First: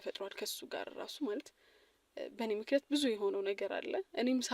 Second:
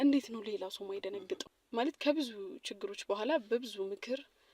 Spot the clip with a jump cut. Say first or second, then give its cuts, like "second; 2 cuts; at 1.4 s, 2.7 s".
second; 1 cut; at 1.4 s